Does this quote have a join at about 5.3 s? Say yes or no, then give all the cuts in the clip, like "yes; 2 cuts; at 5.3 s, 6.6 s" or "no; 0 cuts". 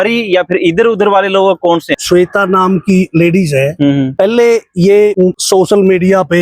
yes; 3 cuts; at 2.0 s, 4.1 s, 5.3 s